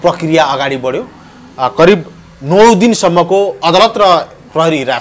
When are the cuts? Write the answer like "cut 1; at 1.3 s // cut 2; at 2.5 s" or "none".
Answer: none